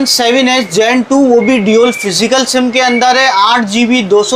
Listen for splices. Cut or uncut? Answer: uncut